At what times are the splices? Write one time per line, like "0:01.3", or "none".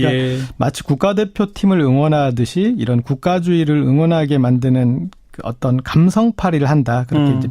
0:03.7